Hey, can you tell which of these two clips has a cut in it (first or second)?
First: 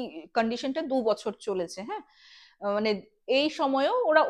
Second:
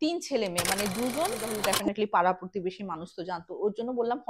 second